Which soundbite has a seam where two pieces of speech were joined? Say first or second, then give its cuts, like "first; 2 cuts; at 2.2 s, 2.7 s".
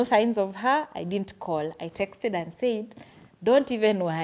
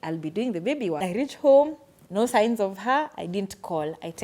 second; 1 cut; at 1.0 s